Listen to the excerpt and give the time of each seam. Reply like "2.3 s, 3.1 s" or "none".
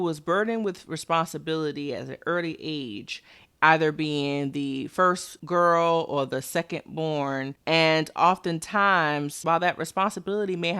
7.5 s